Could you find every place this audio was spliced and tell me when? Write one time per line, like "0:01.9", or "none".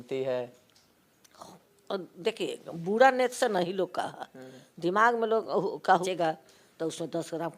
0:06.0